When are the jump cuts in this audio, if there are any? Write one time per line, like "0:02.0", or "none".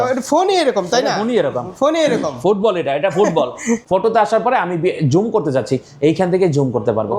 0:03.8

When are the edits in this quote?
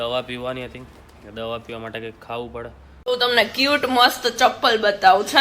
0:02.8

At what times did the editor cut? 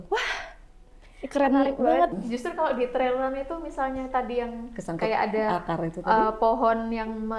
0:02.1

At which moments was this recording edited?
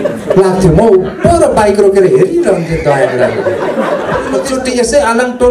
0:04.4

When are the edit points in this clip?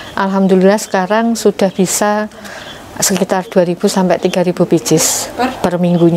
none

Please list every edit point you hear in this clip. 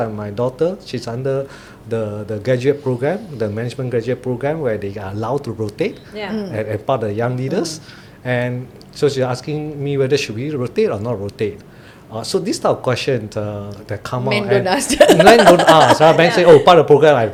none

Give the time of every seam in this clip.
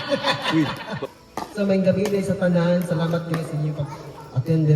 0:01.1

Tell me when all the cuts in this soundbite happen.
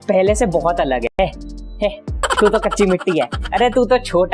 0:01.1

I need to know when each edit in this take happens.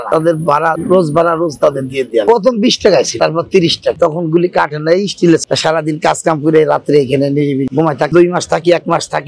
0:03.2
0:05.4

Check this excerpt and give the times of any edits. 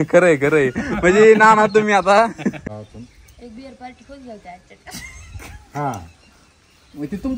0:02.6

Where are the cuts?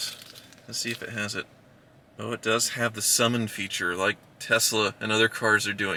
none

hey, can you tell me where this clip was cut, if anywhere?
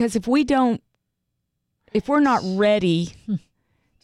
none

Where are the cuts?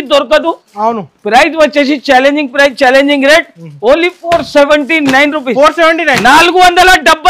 none

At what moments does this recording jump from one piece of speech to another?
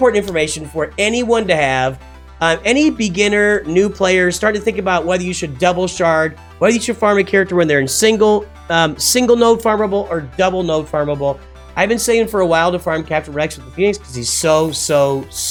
none

